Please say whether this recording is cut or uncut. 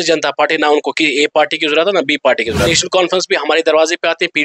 cut